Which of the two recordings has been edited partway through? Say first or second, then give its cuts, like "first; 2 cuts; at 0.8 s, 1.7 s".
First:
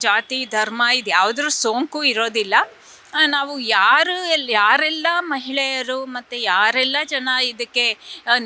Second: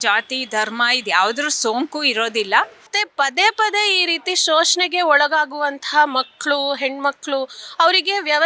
second; 1 cut; at 2.9 s